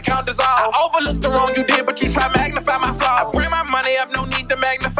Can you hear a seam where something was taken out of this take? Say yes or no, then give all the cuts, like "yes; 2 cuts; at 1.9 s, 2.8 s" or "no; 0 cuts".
no; 0 cuts